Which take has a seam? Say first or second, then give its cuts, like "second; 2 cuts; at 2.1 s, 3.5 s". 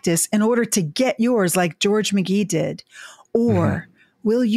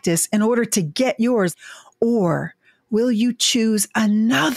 second; 1 cut; at 1.5 s